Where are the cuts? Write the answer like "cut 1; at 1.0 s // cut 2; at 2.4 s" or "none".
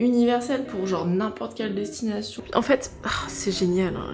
cut 1; at 2.4 s